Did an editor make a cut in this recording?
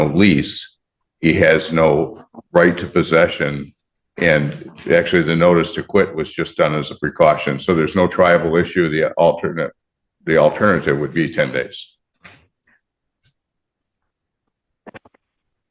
no; 0 cuts

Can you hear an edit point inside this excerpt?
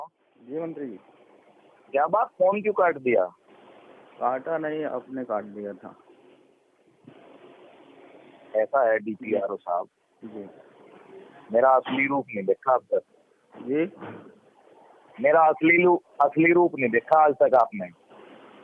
yes; 1 cut; at 2.5 s

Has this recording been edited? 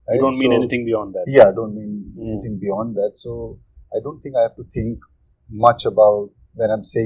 no; 0 cuts

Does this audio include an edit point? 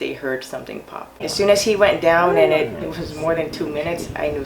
yes; 2 cuts; at 1.1 s, 2.8 s

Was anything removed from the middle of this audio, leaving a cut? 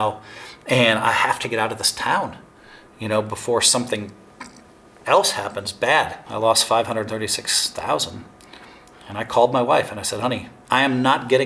yes; 2 cuts; at 6.2 s, 10.5 s

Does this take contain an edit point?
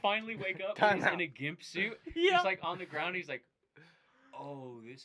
no; 0 cuts

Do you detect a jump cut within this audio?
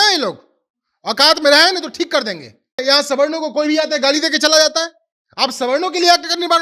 yes; 1 cut; at 2.8 s

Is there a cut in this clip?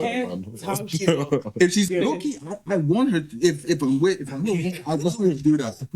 yes; 1 cut; at 1.9 s

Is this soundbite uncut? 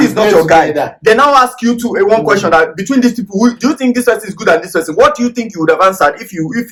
yes; 0 cuts

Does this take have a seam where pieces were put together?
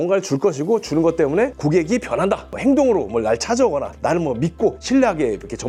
no; 0 cuts

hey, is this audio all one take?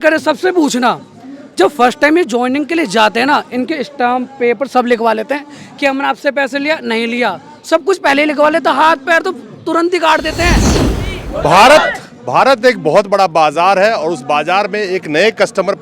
no; 1 cut; at 10.7 s

